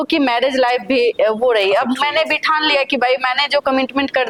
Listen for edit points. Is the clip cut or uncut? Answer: uncut